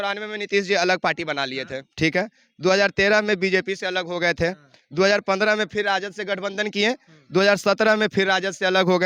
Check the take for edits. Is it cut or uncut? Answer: uncut